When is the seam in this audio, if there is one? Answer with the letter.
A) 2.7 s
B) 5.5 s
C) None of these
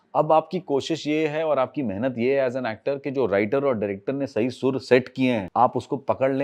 B